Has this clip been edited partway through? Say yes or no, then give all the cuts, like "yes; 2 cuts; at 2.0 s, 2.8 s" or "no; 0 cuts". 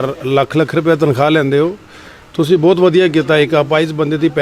no; 0 cuts